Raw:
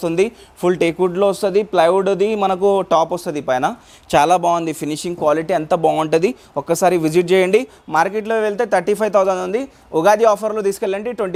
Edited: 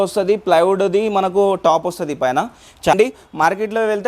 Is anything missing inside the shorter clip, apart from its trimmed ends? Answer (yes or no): yes